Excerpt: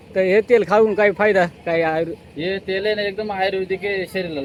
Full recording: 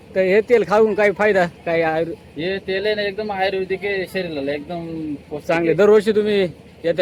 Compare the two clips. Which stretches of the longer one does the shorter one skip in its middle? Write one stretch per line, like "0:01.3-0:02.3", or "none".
none